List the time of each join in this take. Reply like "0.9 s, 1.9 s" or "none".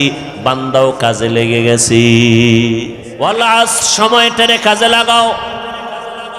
3.0 s